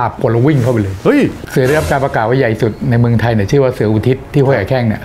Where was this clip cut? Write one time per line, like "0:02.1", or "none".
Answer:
0:01.4